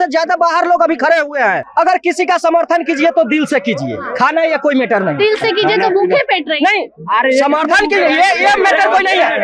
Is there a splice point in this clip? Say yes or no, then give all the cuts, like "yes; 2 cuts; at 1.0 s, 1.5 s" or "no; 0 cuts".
yes; 1 cut; at 1.6 s